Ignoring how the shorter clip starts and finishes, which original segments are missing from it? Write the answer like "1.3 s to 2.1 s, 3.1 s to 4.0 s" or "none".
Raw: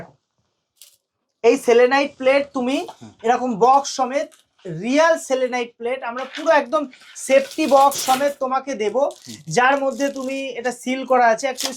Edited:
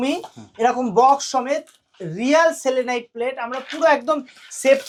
none